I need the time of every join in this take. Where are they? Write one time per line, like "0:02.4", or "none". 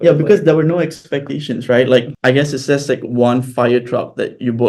0:02.1